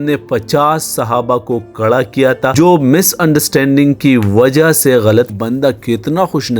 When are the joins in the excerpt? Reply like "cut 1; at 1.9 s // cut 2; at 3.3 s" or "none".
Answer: cut 1; at 5.4 s